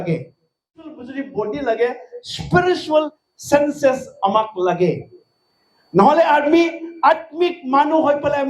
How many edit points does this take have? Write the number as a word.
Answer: one